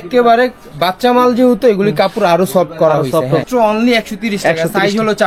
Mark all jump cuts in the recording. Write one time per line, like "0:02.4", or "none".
0:03.4